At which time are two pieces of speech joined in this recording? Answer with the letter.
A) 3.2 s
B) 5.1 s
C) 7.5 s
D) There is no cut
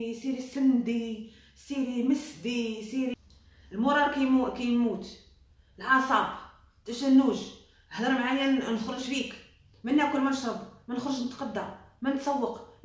A